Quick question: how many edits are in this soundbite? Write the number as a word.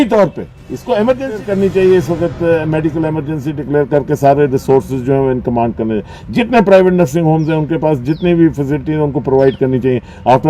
one